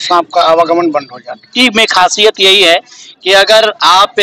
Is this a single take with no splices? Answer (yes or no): no